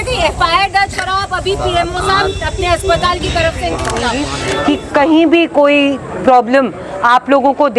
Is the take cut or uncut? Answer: cut